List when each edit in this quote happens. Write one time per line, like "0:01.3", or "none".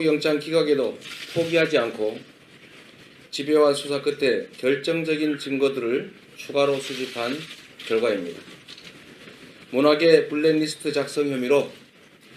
0:04.5

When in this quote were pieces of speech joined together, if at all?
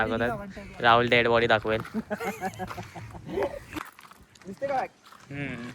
0:03.9

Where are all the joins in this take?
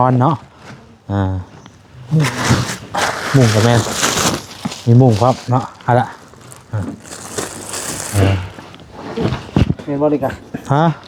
none

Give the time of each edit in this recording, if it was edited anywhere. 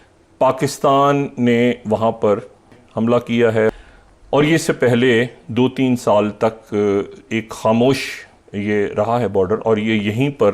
0:02.8
0:03.7

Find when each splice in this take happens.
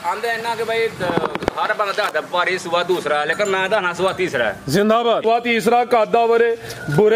0:05.2

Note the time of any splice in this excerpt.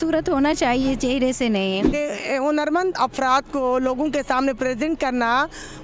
0:01.9

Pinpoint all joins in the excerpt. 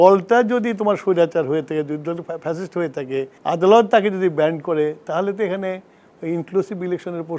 0:03.3

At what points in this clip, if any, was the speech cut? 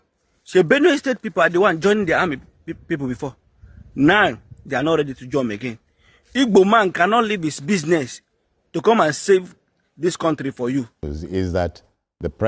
0:11.0

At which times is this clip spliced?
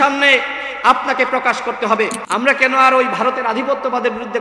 0:02.2

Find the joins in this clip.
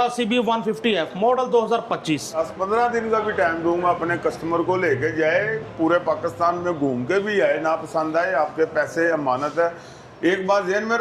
0:02.5

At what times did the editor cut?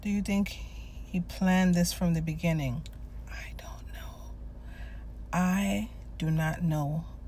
none

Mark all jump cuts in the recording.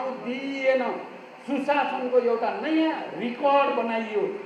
none

